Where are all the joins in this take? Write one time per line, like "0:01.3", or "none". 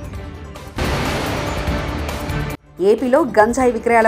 none